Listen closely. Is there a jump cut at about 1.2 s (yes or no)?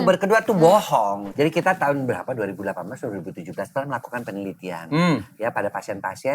yes